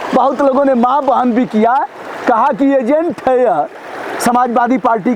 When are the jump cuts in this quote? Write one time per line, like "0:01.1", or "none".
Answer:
none